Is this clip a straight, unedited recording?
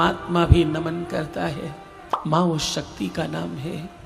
no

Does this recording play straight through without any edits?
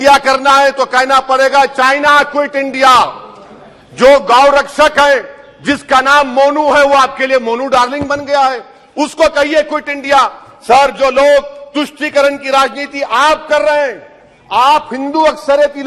yes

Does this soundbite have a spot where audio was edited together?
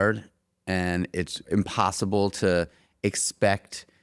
yes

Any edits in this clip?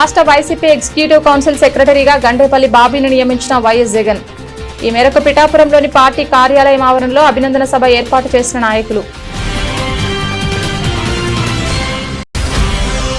yes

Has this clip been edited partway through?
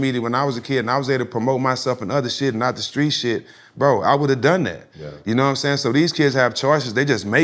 no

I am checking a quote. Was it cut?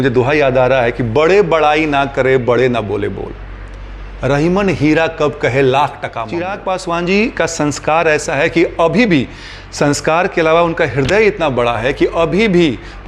yes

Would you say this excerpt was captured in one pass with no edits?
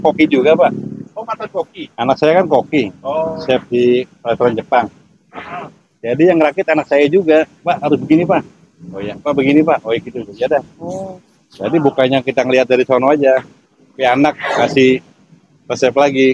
yes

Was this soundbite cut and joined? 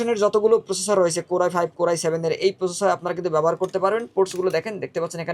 no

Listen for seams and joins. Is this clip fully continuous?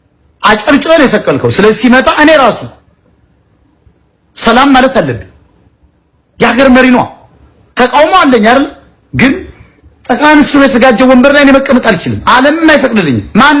yes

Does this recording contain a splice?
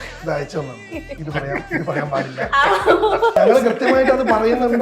yes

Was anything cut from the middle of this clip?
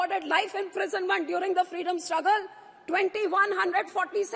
no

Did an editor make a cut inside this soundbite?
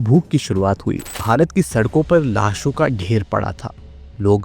yes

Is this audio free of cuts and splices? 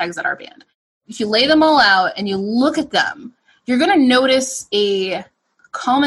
yes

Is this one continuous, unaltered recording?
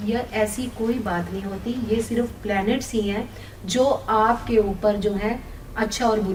yes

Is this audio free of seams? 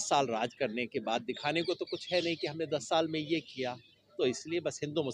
yes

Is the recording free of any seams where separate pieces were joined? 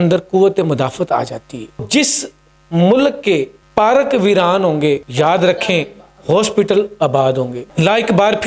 no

